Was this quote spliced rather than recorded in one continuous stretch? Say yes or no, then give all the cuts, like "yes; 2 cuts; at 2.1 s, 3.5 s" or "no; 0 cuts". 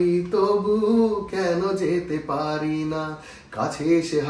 no; 0 cuts